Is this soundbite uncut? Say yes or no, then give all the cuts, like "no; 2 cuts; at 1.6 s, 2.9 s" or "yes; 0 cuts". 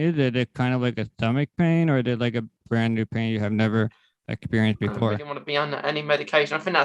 no; 1 cut; at 5.4 s